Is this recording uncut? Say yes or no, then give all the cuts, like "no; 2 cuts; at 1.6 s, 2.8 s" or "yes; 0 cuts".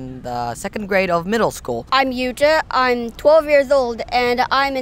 no; 1 cut; at 1.9 s